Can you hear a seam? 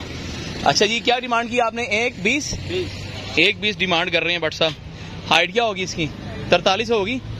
no; 0 cuts

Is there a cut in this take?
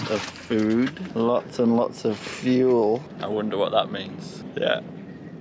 yes; 3 cuts; at 1.0 s, 3.1 s, 4.4 s

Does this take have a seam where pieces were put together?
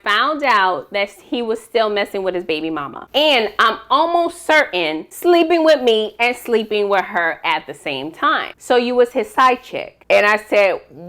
yes; 2 cuts; at 3.0 s, 8.5 s

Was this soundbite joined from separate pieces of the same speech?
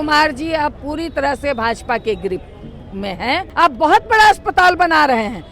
yes; 1 cut; at 3.5 s

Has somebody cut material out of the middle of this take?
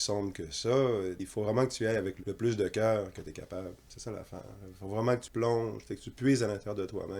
yes; 3 cuts; at 1.2 s, 2.2 s, 5.3 s

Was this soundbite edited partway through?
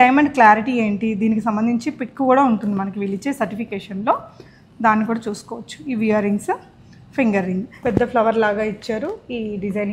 yes; 1 cut; at 7.8 s

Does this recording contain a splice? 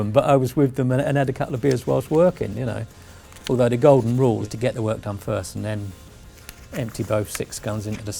no; 0 cuts

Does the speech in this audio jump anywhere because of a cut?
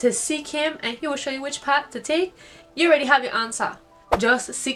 no; 0 cuts

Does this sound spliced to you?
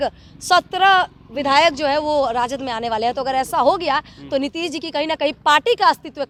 no; 0 cuts

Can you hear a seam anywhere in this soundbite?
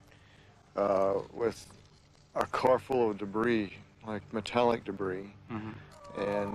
no; 0 cuts

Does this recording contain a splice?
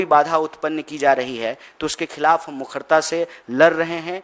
no; 0 cuts

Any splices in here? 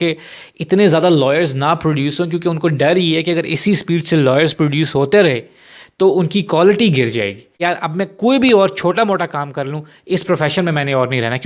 yes; 1 cut; at 7.5 s

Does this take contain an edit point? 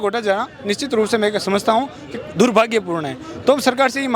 no; 0 cuts

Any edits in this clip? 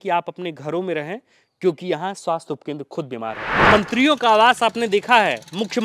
yes; 1 cut; at 3.5 s

